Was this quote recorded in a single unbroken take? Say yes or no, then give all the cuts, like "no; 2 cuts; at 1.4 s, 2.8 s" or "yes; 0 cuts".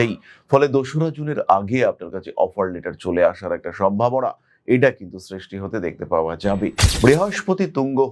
no; 1 cut; at 6.9 s